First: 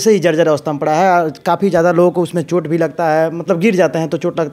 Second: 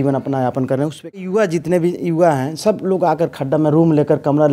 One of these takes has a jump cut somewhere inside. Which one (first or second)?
second